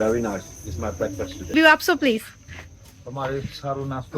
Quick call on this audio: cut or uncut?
cut